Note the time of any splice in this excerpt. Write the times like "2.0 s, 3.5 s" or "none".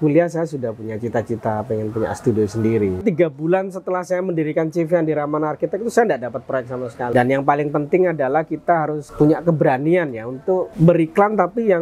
3.0 s, 7.1 s, 9.0 s, 10.7 s